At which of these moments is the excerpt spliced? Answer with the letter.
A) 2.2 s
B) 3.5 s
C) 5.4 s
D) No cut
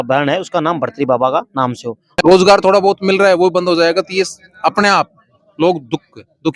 A